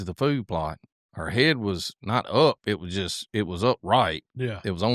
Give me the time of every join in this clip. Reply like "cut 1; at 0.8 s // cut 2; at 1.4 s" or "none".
none